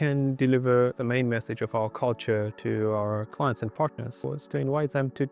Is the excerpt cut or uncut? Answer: cut